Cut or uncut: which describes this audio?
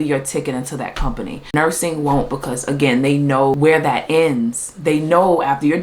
cut